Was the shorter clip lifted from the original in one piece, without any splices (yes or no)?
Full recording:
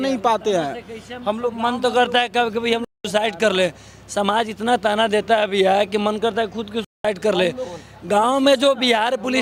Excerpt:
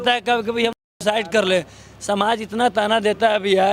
yes